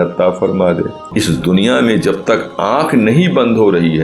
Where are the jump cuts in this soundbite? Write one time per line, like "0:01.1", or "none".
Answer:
0:01.0